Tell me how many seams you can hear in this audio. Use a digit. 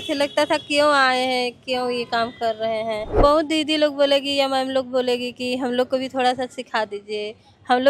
1